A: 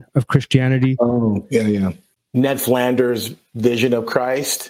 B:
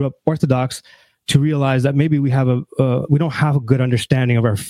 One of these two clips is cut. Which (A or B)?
A